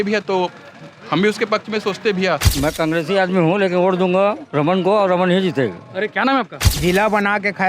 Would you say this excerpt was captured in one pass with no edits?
no; 2 cuts; at 2.5 s, 6.6 s

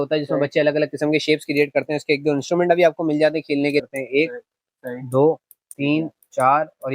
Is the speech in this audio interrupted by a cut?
yes; 1 cut; at 3.8 s

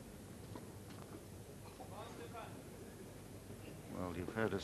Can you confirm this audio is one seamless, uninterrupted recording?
no; 1 cut; at 2.4 s

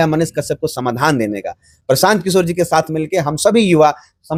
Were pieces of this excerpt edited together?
no; 0 cuts

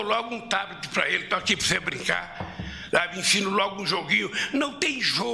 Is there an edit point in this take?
yes; 1 cut; at 4.1 s

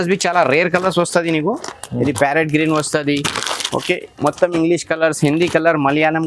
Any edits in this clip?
no; 0 cuts

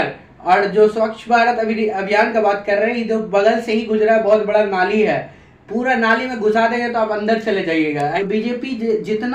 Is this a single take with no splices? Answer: no; 1 cut; at 8.2 s

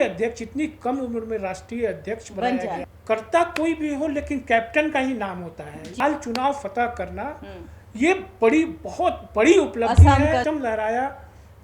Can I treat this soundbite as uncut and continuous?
no; 3 cuts; at 2.9 s, 5.9 s, 10.4 s

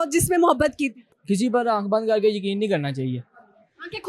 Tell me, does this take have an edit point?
yes; 1 cut; at 1.1 s

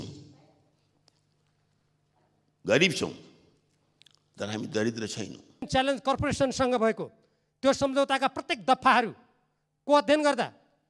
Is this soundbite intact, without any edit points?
no; 1 cut; at 5.7 s

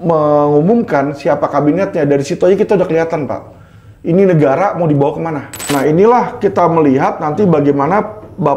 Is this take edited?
yes; 1 cut; at 5.7 s

